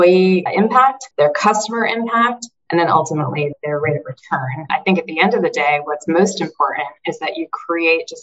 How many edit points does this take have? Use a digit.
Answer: 2